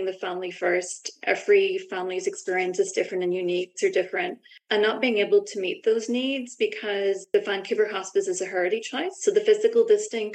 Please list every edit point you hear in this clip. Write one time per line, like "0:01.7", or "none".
0:07.2
0:09.1